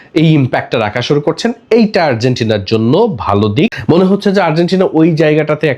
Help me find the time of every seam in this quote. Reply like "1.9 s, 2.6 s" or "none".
3.7 s